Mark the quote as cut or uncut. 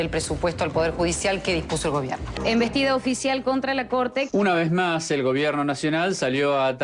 cut